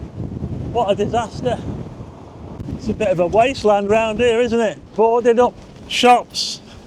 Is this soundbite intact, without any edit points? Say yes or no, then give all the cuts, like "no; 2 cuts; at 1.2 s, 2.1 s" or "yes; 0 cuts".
no; 2 cuts; at 2.5 s, 4.8 s